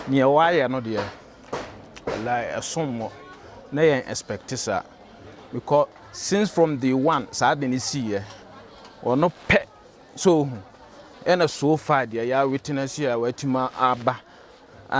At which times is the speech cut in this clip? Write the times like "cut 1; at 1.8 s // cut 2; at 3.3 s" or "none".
none